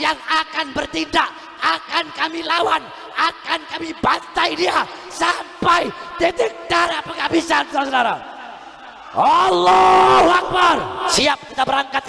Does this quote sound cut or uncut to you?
cut